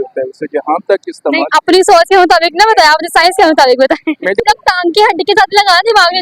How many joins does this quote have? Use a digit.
1